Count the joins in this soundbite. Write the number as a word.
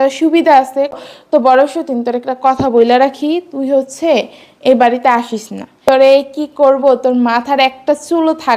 two